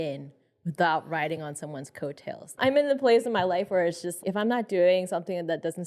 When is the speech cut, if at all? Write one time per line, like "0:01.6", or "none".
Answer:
0:02.5
0:04.2